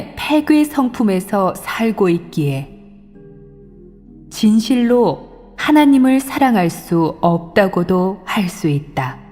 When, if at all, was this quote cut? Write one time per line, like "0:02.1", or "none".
0:05.9